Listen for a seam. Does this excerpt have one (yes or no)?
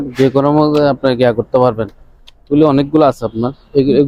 no